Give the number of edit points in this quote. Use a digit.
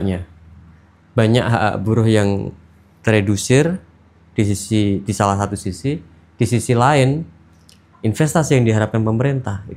0